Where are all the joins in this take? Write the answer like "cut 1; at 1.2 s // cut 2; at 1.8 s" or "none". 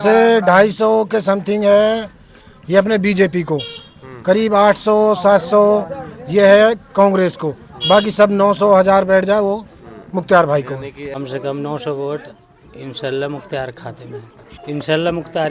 cut 1; at 11.2 s // cut 2; at 14.5 s